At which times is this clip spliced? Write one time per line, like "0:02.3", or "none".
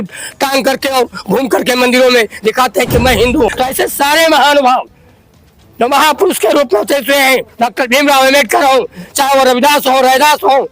0:03.5